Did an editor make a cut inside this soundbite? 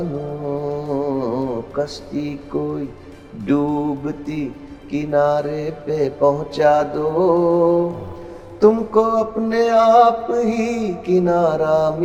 no; 0 cuts

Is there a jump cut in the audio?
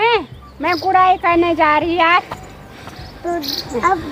no; 0 cuts

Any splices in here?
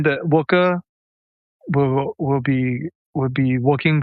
no; 0 cuts

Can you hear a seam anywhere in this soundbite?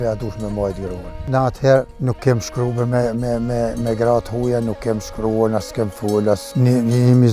yes; 3 cuts; at 1.2 s, 1.9 s, 6.5 s

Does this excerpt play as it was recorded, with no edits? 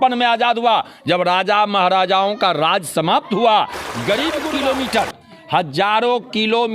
no; 1 cut; at 4.4 s

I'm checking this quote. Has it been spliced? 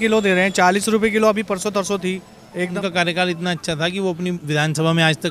yes; 1 cut; at 2.7 s

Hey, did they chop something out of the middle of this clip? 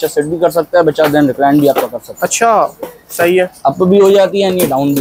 no; 0 cuts

